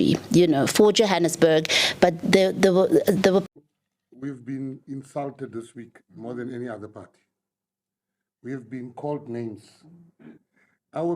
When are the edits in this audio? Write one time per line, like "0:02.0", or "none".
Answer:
0:03.4